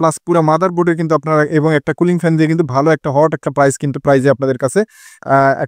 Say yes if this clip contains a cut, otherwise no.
no